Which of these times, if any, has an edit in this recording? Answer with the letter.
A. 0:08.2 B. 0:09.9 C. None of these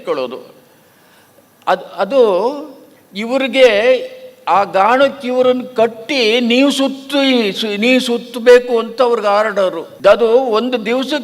B